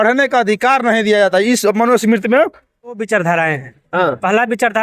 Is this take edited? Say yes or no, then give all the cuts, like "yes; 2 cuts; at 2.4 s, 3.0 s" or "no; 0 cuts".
yes; 1 cut; at 3.0 s